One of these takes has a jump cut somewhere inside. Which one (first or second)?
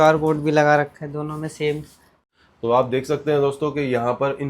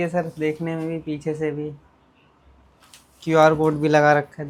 first